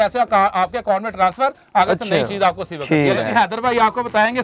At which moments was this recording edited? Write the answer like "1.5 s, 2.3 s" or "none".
3.2 s